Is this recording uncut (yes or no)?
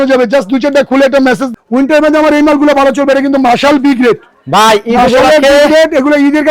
no